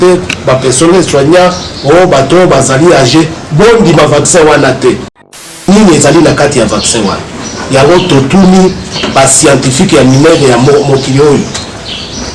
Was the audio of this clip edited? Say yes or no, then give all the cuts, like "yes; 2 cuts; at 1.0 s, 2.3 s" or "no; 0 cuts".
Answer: yes; 1 cut; at 5.3 s